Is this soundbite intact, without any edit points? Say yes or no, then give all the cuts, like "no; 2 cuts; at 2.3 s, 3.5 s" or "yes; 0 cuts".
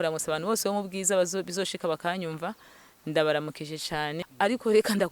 no; 1 cut; at 4.2 s